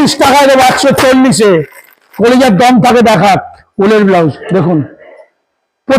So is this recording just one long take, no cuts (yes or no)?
no